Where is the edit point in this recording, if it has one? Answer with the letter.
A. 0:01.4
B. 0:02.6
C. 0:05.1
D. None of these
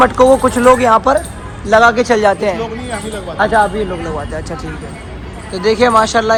D